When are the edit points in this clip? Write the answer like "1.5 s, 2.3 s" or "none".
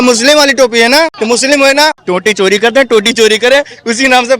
1.2 s, 2.0 s